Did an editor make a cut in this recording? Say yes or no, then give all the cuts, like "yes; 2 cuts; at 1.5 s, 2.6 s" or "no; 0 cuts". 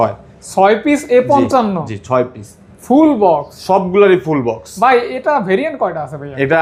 no; 0 cuts